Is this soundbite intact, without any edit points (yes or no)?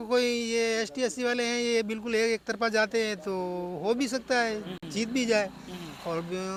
yes